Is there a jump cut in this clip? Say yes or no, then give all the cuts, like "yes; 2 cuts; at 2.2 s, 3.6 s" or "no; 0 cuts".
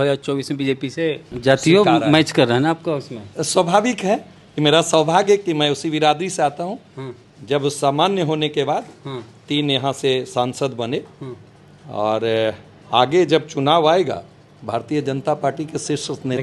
yes; 1 cut; at 1.3 s